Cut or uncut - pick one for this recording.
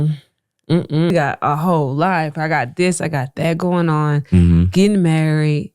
cut